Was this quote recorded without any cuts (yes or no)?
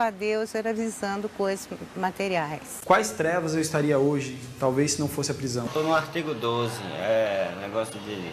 no